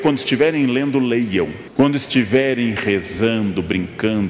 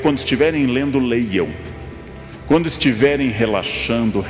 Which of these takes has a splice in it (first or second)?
first